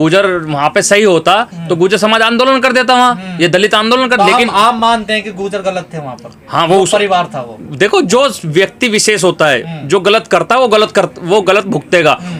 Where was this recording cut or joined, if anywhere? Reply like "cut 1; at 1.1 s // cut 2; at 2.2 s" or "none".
none

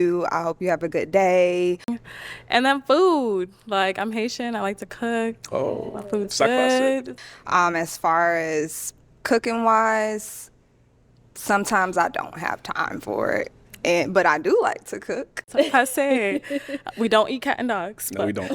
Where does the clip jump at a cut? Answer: cut 1; at 2.0 s // cut 2; at 7.1 s // cut 3; at 15.4 s

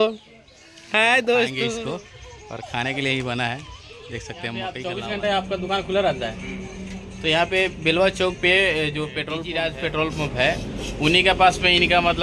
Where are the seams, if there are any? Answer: cut 1; at 1.8 s // cut 2; at 4.8 s // cut 3; at 9.4 s

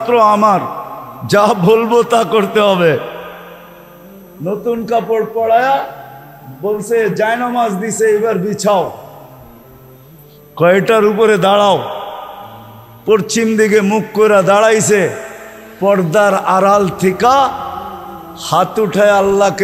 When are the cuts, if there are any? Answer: none

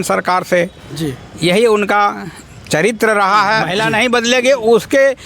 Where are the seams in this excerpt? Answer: cut 1; at 3.7 s

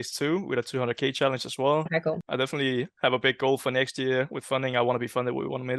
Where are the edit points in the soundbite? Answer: cut 1; at 2.2 s

